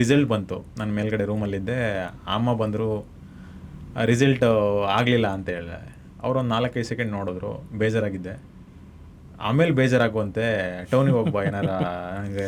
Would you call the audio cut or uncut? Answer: uncut